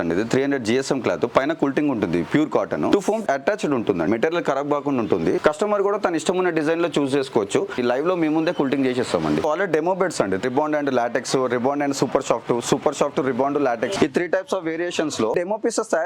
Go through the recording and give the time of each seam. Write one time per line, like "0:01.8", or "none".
0:02.9
0:04.1
0:05.4
0:07.8
0:09.4
0:10.4
0:14.0
0:15.3

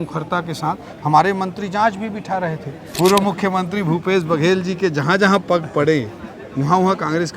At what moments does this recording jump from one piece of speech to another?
0:02.8

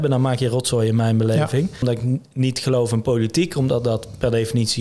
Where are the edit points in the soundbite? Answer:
0:01.8

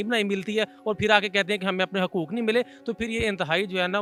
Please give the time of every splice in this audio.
none

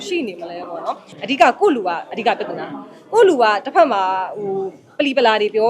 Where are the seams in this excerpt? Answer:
0:01.1

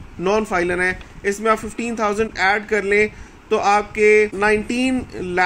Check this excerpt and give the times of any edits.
none

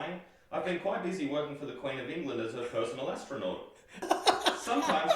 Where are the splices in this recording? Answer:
0:04.1

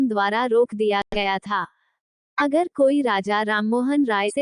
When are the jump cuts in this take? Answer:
none

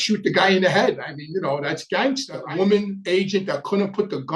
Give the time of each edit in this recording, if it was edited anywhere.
0:02.4

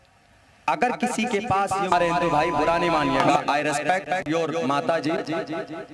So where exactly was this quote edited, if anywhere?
0:01.9

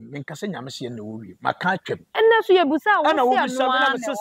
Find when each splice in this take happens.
0:02.1

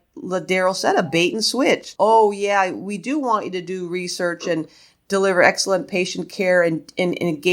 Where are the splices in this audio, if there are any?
0:01.9

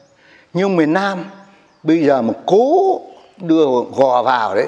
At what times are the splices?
none

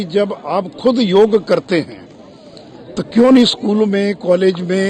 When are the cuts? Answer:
none

